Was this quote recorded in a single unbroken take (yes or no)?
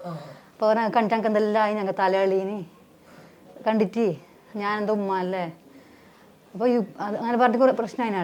yes